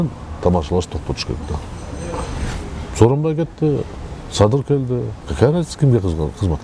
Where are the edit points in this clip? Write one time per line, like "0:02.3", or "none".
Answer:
0:02.5